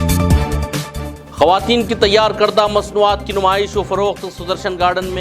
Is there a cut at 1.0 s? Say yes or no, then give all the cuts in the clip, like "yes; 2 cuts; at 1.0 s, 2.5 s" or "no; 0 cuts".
yes; 1 cut; at 1.0 s